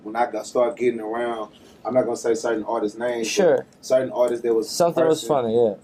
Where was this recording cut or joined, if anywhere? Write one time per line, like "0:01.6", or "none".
none